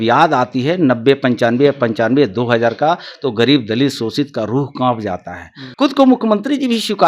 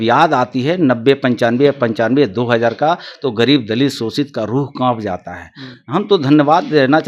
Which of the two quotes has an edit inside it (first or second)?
first